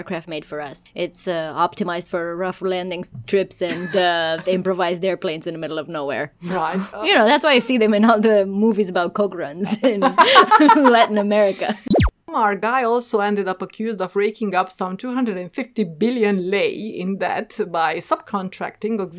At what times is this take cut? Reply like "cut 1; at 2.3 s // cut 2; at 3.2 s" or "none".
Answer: cut 1; at 12.3 s